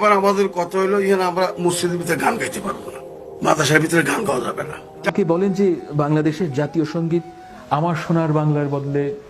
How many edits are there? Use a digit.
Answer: 1